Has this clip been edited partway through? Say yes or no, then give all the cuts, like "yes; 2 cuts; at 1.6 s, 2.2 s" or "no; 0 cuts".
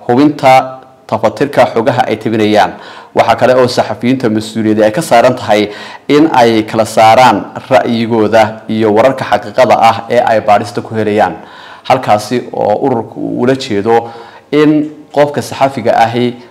no; 0 cuts